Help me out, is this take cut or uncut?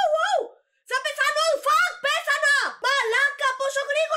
uncut